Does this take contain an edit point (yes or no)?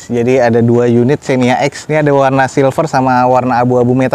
yes